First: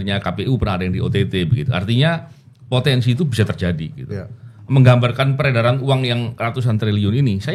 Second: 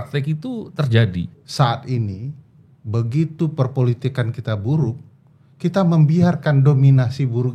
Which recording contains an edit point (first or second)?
second